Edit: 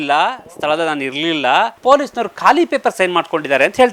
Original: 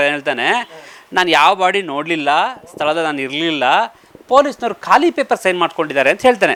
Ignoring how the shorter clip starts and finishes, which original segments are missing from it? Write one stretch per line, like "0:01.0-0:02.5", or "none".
0:03.9-0:04.2